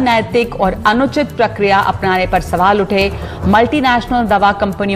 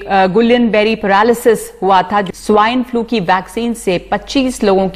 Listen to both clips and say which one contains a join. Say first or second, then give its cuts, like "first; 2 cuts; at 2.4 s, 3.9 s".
second; 1 cut; at 2.3 s